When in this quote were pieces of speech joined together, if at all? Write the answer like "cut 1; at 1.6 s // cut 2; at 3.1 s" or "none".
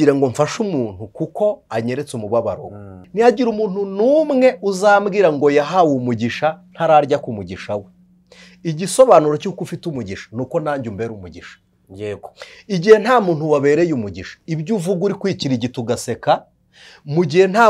cut 1; at 3.0 s